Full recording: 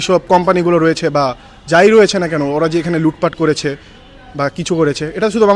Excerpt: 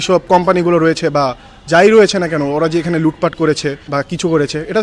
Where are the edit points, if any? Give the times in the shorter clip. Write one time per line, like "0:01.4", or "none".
0:03.8